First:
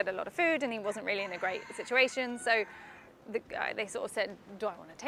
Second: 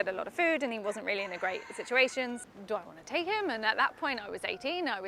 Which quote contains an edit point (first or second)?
second